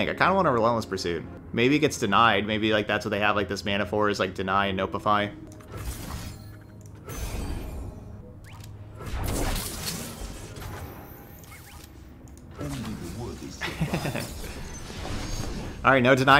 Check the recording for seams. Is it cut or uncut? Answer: cut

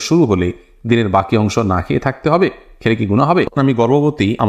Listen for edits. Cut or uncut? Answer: cut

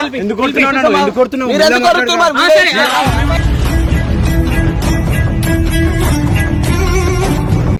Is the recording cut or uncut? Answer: uncut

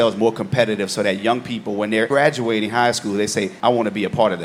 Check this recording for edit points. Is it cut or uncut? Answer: uncut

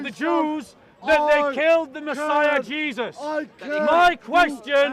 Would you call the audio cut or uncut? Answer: uncut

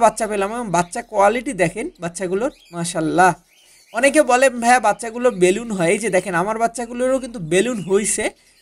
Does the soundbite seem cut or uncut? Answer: uncut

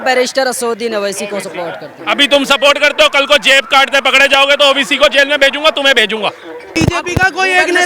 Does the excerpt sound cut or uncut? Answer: cut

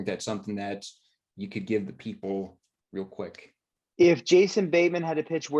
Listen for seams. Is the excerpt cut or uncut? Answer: uncut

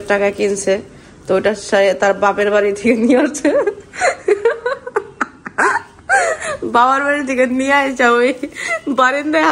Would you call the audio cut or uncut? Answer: uncut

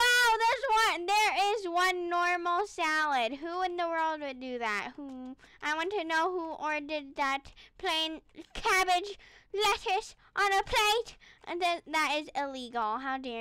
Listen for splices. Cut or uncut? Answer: uncut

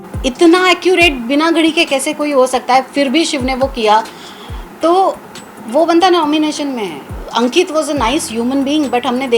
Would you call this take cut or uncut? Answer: cut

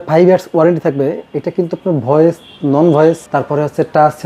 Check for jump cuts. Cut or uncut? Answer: cut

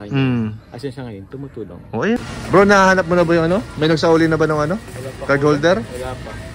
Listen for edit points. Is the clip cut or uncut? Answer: cut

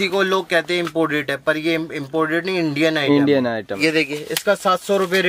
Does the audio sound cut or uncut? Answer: cut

